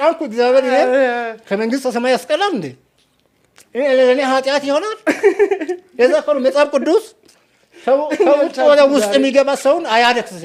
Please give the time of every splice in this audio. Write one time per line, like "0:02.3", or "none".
none